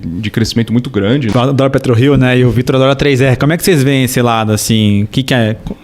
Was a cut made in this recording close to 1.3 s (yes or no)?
yes